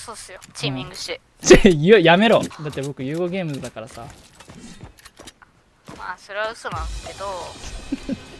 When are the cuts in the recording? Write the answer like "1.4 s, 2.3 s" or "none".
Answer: 1.3 s, 2.5 s